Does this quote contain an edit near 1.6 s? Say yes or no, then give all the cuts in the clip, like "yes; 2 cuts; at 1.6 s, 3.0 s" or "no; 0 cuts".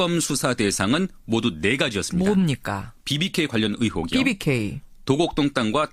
no; 1 cut; at 3.9 s